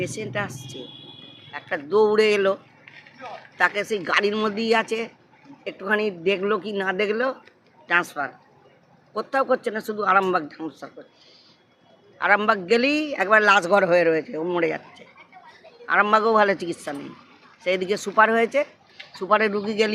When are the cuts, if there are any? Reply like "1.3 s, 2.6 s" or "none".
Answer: none